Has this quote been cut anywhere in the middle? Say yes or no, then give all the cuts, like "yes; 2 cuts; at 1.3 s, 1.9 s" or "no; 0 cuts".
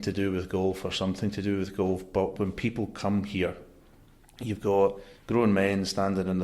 yes; 1 cut; at 5.1 s